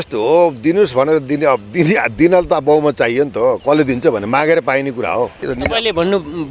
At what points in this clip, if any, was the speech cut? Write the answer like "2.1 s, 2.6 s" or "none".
5.5 s